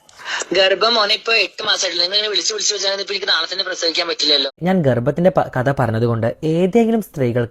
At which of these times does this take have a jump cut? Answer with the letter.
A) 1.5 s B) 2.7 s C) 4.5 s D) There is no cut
C